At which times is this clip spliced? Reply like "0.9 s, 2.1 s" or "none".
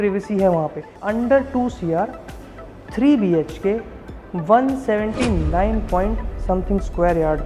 1.0 s

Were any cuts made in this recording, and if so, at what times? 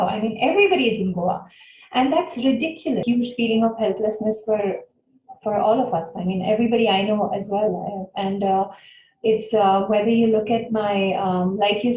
3.0 s

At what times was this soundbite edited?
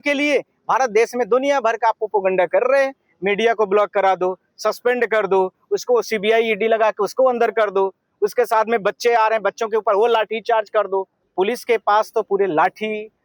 11.2 s

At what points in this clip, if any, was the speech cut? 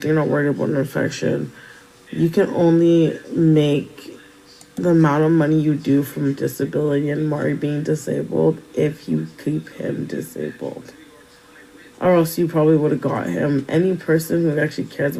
3.5 s

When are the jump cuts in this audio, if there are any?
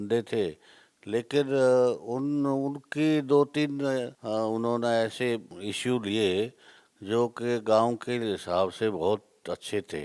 4.2 s, 5.5 s

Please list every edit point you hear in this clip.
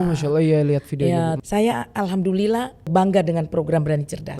1.4 s, 2.9 s

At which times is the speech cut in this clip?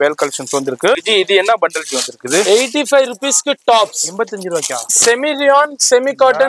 1.0 s

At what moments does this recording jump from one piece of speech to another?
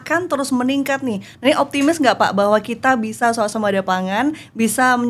1.3 s

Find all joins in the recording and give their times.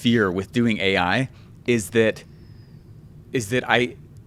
none

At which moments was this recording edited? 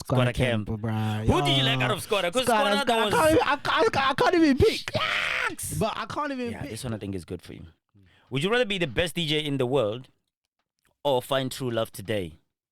6.7 s

